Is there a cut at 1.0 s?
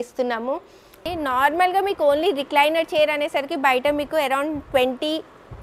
yes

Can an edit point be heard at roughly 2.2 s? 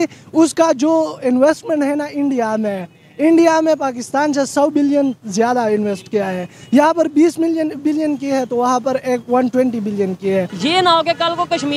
no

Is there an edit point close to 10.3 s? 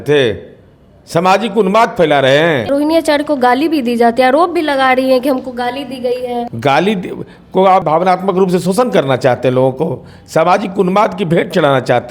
no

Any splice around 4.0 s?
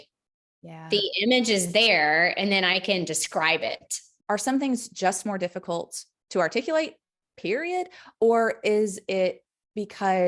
yes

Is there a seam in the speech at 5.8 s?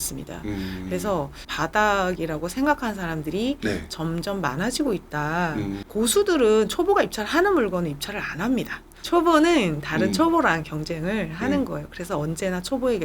yes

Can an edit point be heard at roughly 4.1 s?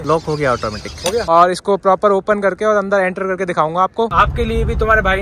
yes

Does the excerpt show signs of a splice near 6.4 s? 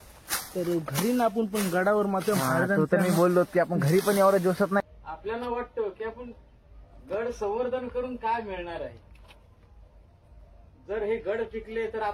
no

